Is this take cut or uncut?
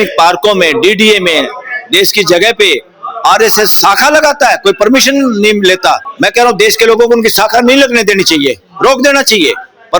cut